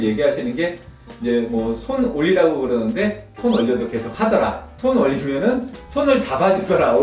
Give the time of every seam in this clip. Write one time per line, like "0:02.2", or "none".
0:03.3
0:04.7

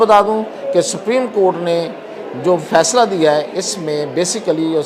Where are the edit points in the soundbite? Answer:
none

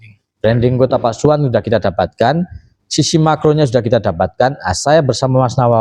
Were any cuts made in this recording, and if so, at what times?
none

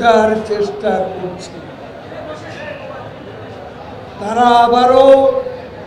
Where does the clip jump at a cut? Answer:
0:04.0

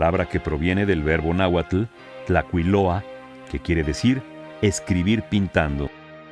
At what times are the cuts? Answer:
0:01.1

